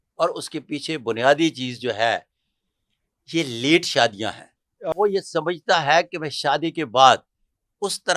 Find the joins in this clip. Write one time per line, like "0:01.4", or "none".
0:04.9